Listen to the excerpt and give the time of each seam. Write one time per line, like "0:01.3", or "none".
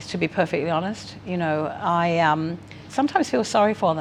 none